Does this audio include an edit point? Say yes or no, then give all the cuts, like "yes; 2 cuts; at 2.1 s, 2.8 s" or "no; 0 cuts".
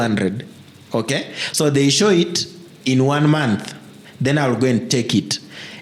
no; 0 cuts